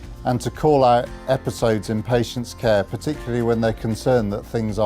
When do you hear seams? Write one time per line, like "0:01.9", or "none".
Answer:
0:03.7